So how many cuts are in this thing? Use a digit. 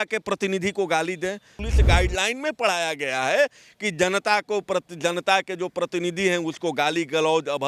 1